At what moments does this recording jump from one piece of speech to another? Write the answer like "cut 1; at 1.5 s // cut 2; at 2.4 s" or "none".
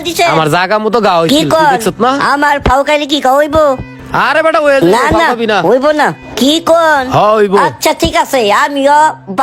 none